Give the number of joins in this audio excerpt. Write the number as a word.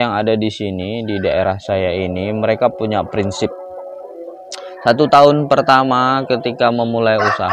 zero